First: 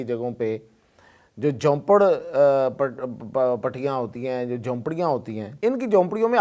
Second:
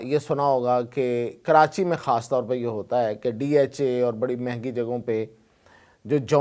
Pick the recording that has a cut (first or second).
first